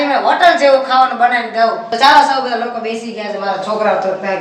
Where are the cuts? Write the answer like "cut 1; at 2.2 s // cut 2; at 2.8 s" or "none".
cut 1; at 1.9 s